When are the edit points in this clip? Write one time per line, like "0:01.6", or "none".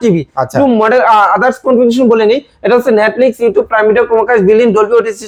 none